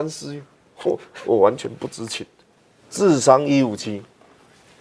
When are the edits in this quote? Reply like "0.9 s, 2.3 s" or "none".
none

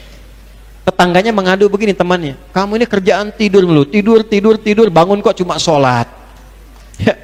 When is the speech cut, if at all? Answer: none

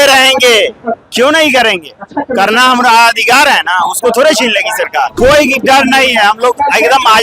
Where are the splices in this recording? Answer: 5.1 s

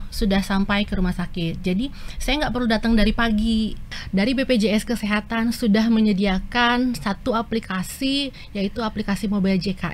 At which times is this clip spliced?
3.9 s

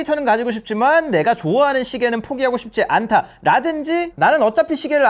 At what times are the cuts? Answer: none

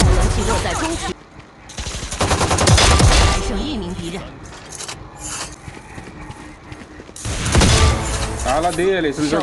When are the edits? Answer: 1.1 s, 5.6 s

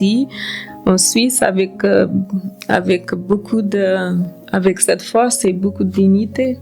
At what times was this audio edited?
none

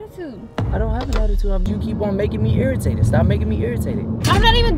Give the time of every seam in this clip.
1.7 s

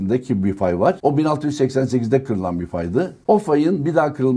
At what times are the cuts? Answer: 1.0 s, 3.1 s

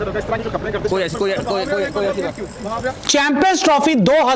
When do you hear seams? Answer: none

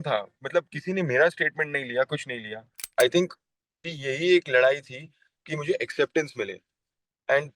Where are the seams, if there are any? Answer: 2.9 s

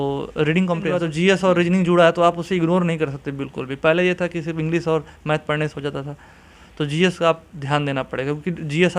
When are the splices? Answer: 1.0 s

